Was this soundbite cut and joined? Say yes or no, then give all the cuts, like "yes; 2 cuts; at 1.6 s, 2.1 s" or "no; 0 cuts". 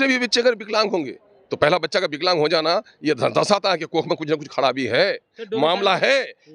no; 0 cuts